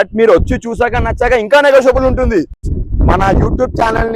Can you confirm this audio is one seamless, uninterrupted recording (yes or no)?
no